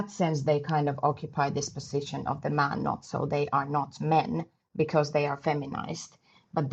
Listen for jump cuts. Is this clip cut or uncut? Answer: uncut